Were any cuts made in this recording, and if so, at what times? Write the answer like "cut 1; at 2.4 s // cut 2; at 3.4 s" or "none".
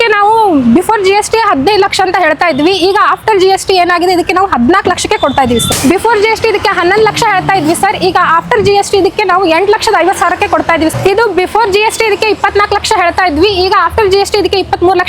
cut 1; at 5.7 s // cut 2; at 10.9 s